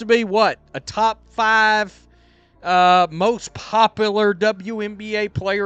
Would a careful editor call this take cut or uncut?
uncut